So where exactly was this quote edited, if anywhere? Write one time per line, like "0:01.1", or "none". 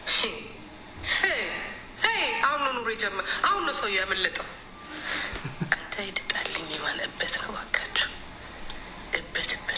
none